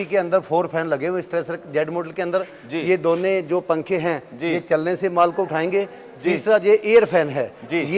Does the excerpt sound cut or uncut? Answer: uncut